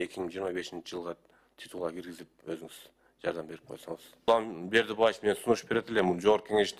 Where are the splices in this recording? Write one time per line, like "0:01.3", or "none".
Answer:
0:04.1

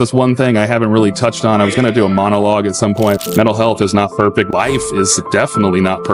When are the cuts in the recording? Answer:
0:03.2
0:04.5

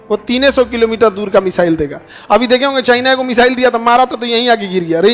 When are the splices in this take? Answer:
none

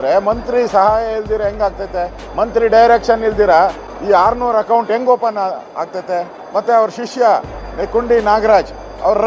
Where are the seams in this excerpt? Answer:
0:02.2
0:03.9
0:06.4

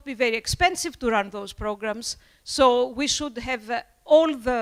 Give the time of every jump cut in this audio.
none

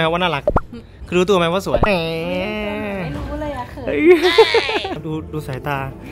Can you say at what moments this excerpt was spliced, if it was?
0:01.8
0:05.0

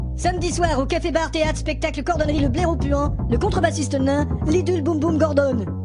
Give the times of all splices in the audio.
0:04.6

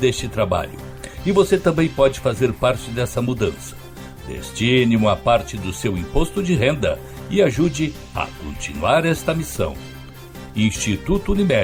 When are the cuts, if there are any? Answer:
none

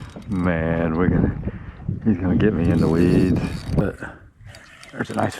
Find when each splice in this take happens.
0:03.8

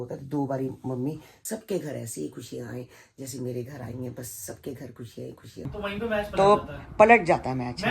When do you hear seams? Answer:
0:01.3
0:05.7

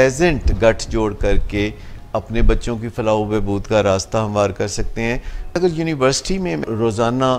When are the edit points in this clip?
0:05.6
0:06.6

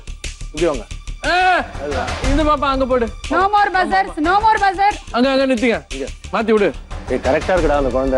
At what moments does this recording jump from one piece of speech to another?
0:05.1
0:06.9

